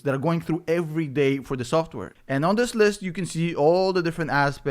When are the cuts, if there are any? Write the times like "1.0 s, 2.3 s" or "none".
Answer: 2.0 s